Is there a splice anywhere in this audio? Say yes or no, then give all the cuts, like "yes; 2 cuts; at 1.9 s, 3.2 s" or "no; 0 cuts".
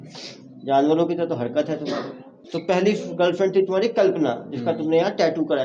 yes; 1 cut; at 2.5 s